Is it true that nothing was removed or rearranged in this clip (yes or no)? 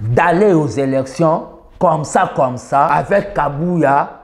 no